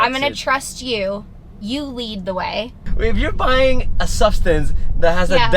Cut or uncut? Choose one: cut